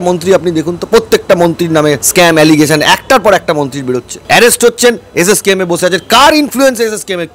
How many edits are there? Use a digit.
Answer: 2